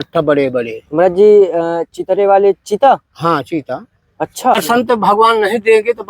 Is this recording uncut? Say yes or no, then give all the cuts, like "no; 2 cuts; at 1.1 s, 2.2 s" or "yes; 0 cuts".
no; 1 cut; at 4.5 s